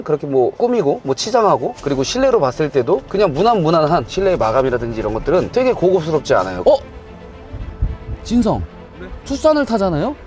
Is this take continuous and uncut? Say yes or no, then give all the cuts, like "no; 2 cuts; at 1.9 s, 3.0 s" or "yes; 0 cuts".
no; 2 cuts; at 1.7 s, 6.5 s